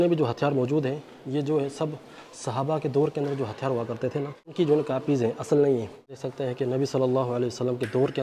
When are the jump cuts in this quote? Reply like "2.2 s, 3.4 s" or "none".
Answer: 4.4 s, 6.3 s

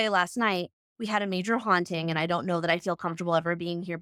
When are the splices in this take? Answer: none

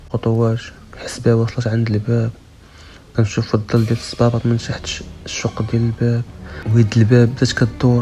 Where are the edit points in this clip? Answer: 6.5 s

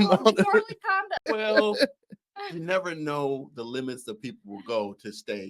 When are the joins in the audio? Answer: 1.1 s

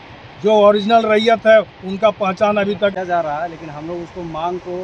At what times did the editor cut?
2.9 s

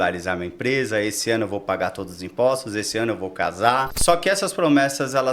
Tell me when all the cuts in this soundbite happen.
3.9 s

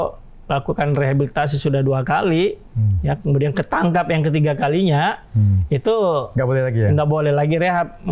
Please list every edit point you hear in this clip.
none

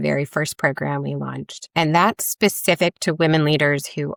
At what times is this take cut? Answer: none

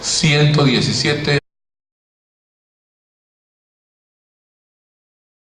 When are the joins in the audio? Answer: none

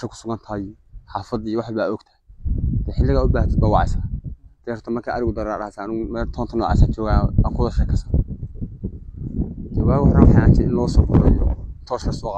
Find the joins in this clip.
none

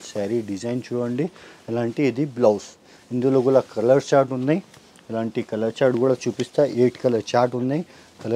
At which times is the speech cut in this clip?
none

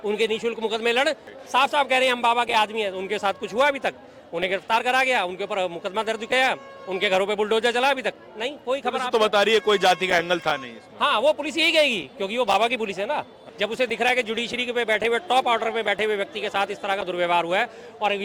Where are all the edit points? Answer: 1.3 s, 13.4 s

